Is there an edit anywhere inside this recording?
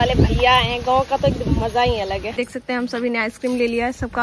yes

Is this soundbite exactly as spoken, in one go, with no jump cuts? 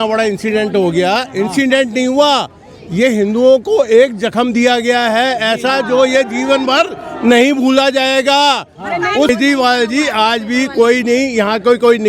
no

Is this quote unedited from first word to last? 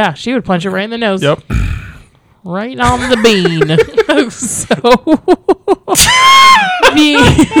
yes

